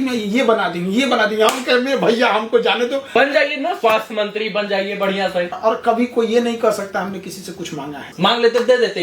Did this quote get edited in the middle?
yes; 3 cuts; at 3.1 s, 5.5 s, 8.1 s

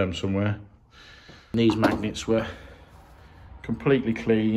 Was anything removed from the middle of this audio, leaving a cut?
yes; 1 cut; at 1.5 s

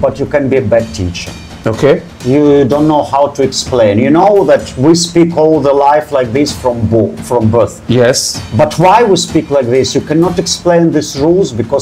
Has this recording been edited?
no; 0 cuts

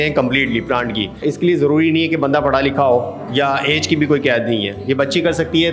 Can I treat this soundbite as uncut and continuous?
no; 1 cut; at 1.2 s

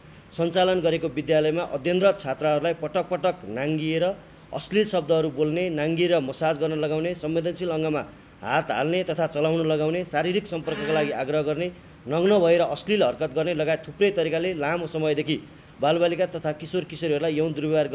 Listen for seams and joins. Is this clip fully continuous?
yes; 0 cuts

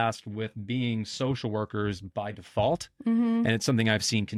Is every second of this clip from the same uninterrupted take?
yes; 0 cuts

